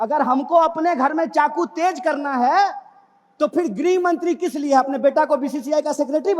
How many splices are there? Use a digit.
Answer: 0